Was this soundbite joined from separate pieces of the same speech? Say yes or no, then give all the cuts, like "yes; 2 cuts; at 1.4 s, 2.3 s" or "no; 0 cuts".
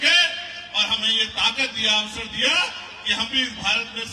no; 0 cuts